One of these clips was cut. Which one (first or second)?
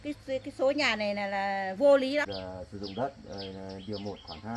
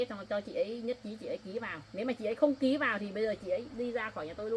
first